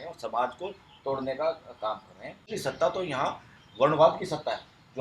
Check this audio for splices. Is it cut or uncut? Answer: cut